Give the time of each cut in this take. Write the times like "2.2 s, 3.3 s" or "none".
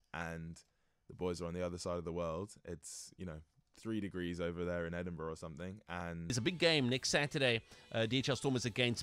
6.3 s